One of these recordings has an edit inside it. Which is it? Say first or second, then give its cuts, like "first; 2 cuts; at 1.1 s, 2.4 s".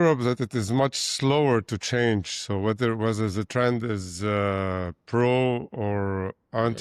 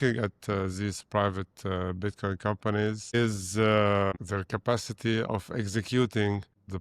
second; 2 cuts; at 3.1 s, 4.1 s